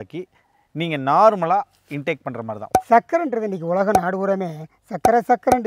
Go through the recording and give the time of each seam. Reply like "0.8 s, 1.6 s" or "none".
2.7 s